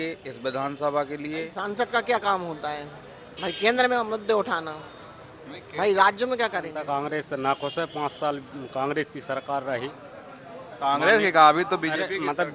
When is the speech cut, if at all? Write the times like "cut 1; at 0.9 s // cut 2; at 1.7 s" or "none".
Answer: cut 1; at 1.5 s // cut 2; at 6.7 s

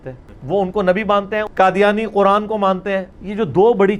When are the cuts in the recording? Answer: cut 1; at 1.5 s // cut 2; at 3.1 s

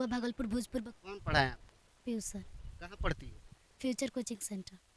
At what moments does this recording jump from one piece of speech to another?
cut 1; at 0.9 s

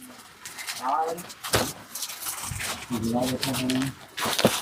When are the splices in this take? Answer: none

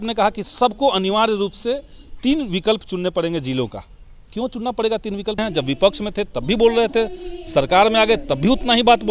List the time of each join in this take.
cut 1; at 5.4 s

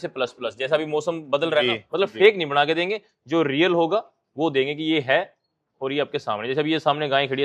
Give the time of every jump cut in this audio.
cut 1; at 1.9 s

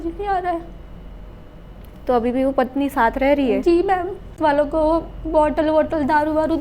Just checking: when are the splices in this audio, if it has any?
cut 1; at 4.4 s

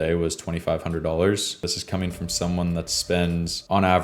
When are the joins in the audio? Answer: cut 1; at 1.6 s

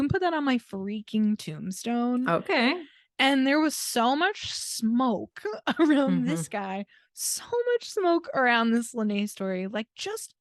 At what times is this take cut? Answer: none

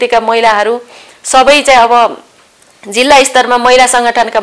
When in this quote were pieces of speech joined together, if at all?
none

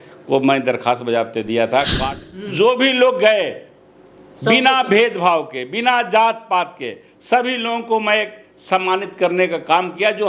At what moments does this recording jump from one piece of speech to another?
cut 1; at 2.1 s

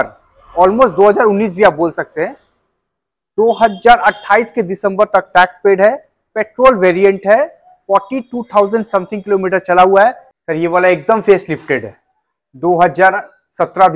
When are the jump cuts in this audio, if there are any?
cut 1; at 10.3 s

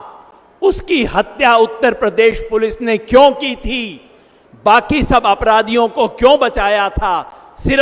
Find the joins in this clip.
none

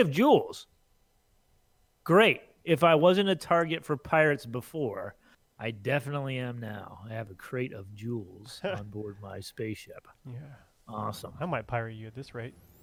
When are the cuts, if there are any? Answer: none

